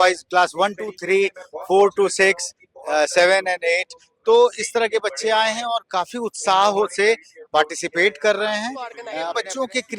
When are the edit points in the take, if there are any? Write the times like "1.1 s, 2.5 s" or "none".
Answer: 9.1 s